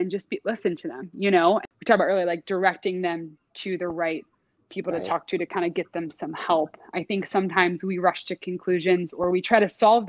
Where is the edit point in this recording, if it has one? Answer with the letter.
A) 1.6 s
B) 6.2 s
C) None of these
A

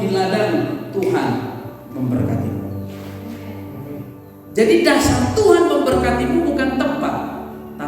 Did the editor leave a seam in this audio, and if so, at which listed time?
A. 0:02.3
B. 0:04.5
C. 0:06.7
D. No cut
B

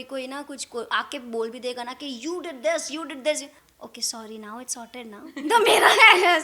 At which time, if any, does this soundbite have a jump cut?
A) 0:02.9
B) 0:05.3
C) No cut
C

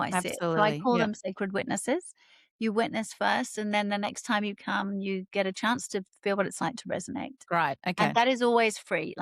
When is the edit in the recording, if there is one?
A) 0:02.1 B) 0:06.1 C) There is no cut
C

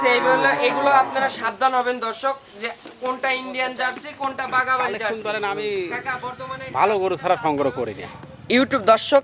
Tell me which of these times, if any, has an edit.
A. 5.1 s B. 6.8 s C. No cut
A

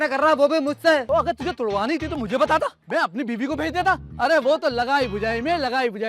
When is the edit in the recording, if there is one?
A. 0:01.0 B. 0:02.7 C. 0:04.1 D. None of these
A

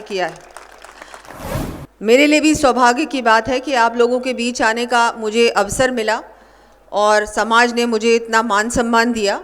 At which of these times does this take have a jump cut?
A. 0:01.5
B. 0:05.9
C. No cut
A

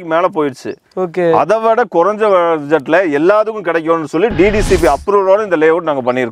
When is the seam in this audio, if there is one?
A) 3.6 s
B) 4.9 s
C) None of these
C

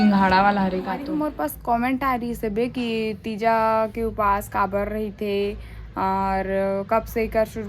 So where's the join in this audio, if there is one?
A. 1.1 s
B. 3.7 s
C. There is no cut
A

